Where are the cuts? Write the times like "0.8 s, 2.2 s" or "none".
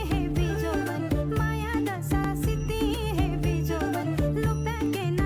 none